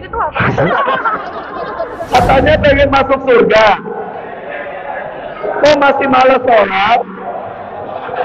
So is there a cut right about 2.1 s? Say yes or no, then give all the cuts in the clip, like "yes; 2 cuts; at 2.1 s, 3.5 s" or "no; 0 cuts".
yes; 1 cut; at 2.1 s